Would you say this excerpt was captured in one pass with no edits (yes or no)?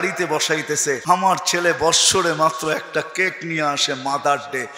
no